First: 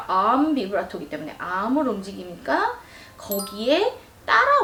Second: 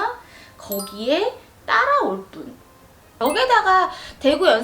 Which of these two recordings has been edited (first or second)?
second